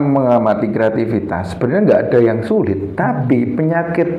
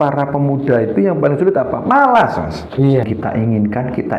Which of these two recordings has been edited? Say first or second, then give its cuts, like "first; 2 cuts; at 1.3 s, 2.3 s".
second; 1 cut; at 3.1 s